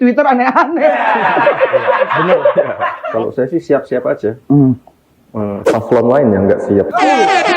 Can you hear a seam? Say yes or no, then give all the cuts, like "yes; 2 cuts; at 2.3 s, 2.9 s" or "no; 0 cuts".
yes; 1 cut; at 3.4 s